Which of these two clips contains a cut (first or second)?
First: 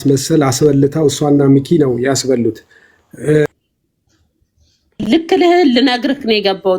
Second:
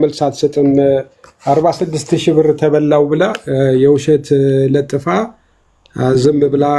first